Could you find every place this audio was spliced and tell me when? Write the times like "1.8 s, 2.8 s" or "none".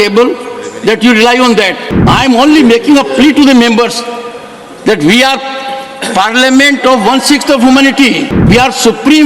1.9 s, 8.3 s